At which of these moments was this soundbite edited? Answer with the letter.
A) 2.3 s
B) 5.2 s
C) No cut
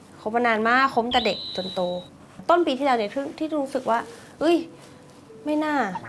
A